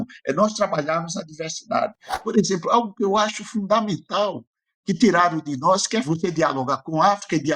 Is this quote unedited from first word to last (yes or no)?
no